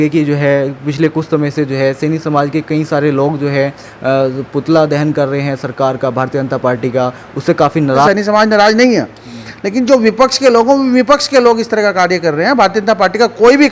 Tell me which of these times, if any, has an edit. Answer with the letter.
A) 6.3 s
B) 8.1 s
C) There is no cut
B